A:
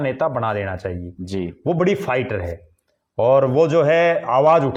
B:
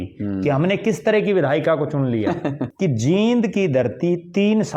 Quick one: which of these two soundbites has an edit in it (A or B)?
B